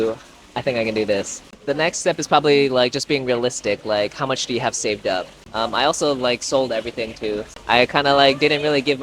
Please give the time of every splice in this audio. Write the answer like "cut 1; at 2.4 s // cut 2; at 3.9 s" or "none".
cut 1; at 1.5 s // cut 2; at 5.4 s // cut 3; at 7.5 s